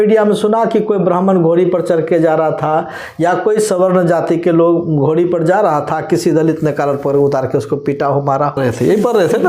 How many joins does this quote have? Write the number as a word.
one